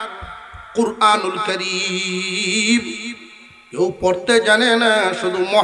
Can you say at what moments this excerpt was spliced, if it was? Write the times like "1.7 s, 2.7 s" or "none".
none